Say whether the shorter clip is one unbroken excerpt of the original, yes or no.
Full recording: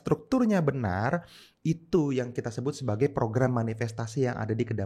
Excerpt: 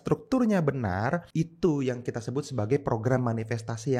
no